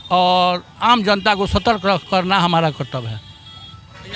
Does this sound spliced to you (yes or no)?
no